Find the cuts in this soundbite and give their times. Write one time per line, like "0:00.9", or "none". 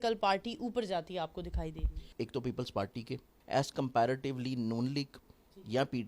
0:02.1
0:03.3